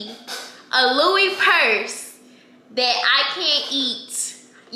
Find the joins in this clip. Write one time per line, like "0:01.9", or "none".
none